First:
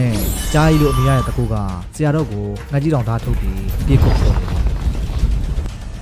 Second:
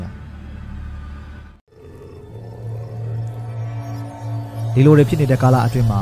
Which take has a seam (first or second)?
second